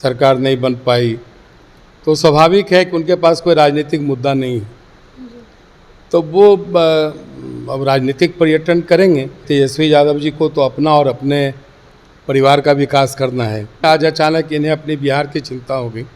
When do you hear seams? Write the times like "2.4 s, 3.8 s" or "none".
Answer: 9.4 s, 13.8 s